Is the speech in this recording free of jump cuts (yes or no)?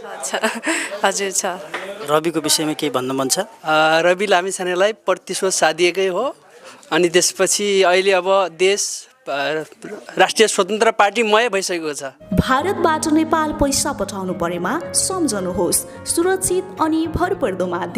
no